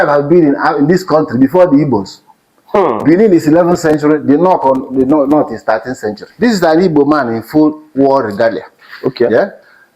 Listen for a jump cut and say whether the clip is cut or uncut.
cut